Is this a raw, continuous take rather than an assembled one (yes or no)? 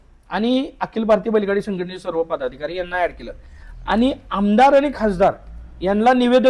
yes